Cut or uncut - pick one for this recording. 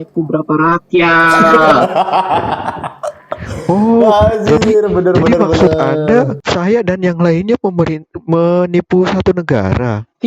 cut